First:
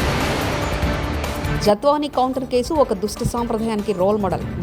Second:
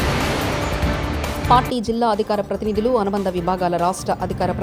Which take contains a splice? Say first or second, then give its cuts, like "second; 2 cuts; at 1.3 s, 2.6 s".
first; 1 cut; at 1.4 s